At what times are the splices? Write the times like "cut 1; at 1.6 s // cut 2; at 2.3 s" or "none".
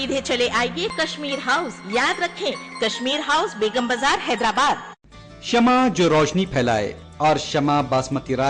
cut 1; at 5.2 s